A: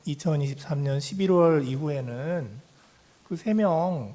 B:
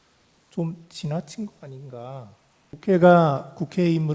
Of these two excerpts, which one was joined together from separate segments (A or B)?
B